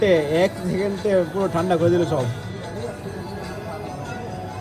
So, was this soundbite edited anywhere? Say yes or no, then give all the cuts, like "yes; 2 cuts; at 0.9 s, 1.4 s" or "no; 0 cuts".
no; 0 cuts